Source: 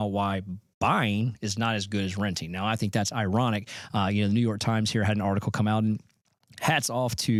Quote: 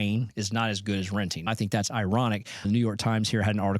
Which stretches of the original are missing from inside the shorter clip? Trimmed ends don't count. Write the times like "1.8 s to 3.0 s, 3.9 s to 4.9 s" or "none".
2.5 s to 2.7 s, 3.9 s to 4.3 s